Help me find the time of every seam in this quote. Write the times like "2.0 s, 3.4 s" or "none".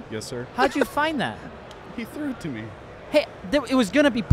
none